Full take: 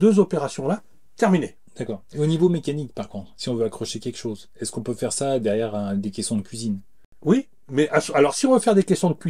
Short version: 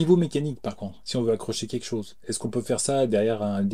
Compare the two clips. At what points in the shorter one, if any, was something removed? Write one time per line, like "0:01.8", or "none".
none